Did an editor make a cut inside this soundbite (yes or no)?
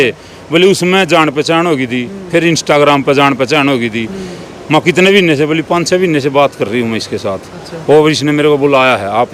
no